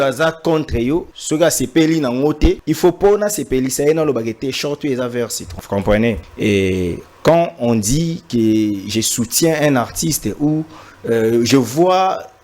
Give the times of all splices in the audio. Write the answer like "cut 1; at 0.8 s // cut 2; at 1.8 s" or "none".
cut 1; at 1.1 s // cut 2; at 2.7 s // cut 3; at 5.5 s // cut 4; at 6.3 s